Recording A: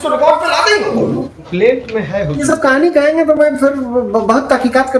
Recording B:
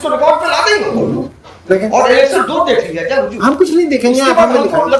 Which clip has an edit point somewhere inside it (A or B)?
A